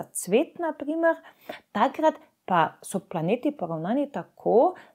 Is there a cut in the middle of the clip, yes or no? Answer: no